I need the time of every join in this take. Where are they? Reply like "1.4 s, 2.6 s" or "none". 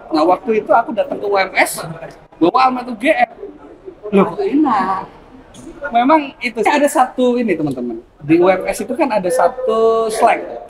6.6 s

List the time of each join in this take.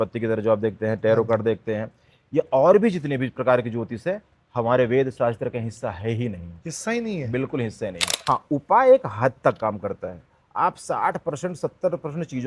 8.1 s

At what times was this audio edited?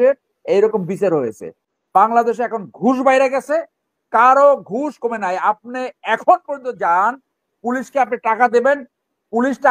1.7 s

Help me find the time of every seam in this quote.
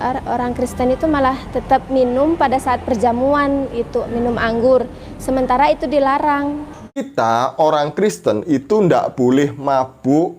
7.1 s

